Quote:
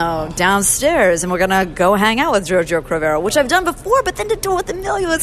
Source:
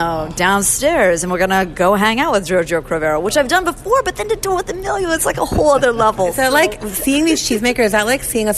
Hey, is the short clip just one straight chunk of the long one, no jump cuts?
yes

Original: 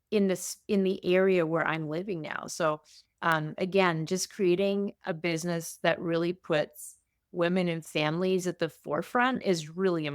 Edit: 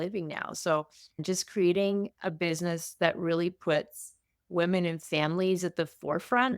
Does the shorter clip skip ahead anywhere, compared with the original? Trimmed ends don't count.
yes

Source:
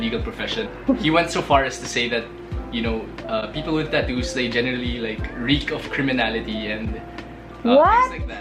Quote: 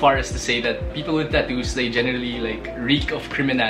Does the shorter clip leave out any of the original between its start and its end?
yes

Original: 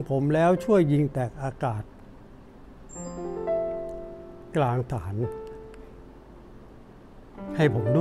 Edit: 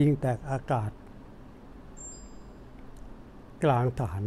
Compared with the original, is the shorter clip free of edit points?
yes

